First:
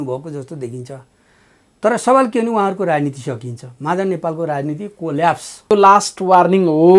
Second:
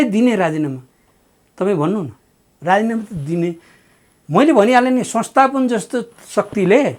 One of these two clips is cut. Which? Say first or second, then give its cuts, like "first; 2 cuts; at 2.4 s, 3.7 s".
first; 1 cut; at 5.7 s